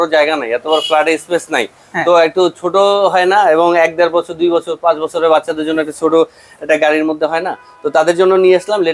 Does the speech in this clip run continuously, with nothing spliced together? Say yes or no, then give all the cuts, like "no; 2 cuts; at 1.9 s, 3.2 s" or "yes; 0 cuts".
yes; 0 cuts